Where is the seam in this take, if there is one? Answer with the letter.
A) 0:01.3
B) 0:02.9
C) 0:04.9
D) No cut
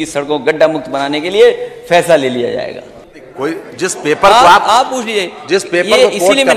B